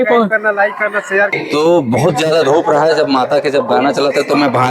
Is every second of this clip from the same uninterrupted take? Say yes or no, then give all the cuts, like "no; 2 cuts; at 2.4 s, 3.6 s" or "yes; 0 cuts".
no; 1 cut; at 1.3 s